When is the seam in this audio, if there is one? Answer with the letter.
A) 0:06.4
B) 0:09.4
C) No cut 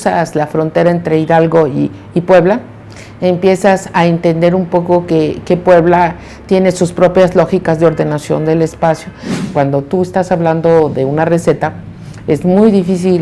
B